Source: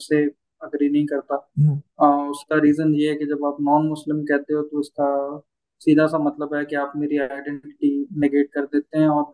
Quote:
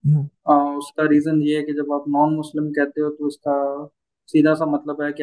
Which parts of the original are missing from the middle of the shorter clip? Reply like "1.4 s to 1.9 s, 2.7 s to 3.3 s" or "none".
none